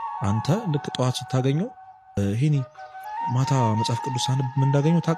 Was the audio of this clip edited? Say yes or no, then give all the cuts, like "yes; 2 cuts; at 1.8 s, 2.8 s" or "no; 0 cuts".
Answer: no; 0 cuts